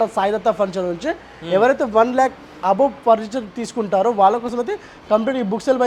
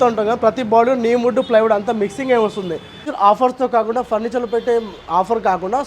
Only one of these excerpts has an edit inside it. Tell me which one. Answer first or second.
second